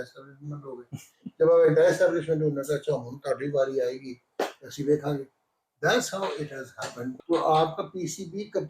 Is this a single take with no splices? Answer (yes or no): no